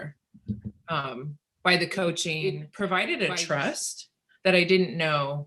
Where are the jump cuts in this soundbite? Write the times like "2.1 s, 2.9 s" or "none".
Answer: 2.4 s